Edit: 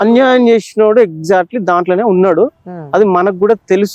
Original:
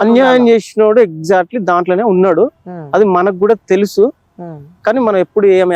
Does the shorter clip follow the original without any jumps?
yes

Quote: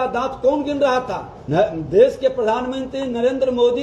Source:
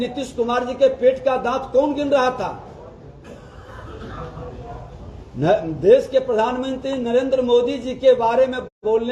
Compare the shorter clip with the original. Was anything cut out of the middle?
yes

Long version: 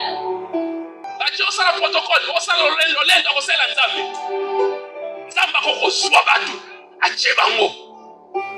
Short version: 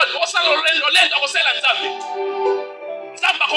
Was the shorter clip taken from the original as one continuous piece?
yes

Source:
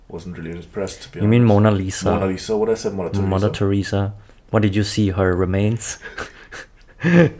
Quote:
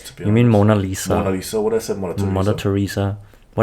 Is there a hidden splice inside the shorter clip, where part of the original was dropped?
no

